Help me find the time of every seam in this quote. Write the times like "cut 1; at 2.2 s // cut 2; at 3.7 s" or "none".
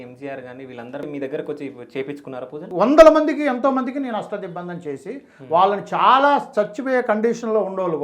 cut 1; at 1.0 s // cut 2; at 2.6 s